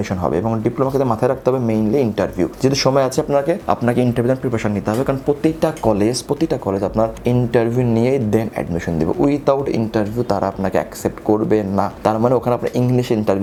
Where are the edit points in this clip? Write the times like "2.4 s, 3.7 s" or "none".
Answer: none

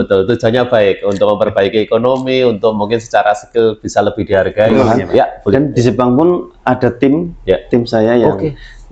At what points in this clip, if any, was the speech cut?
4.8 s

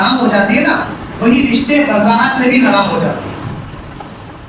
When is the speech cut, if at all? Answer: none

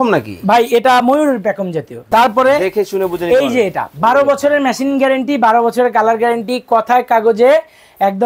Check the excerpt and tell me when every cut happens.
2.1 s

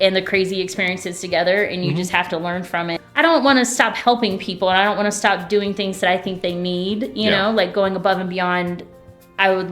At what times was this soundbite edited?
3.0 s

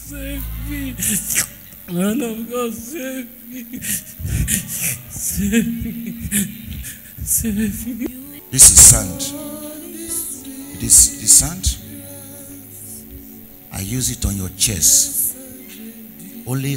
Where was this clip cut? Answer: 8.1 s

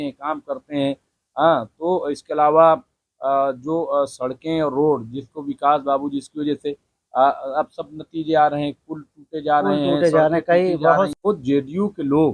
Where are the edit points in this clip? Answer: 11.1 s

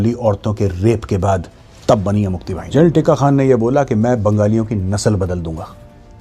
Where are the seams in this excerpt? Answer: 2.5 s

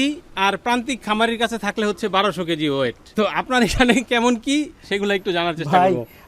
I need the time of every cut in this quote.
3.0 s

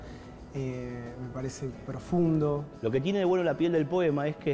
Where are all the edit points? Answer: none

